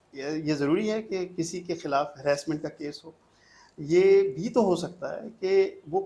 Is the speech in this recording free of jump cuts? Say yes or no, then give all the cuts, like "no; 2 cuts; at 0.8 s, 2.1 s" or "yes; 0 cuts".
yes; 0 cuts